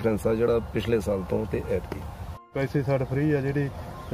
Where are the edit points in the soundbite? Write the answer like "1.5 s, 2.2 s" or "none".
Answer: 2.5 s